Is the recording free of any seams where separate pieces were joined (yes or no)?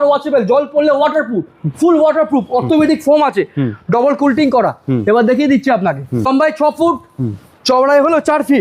no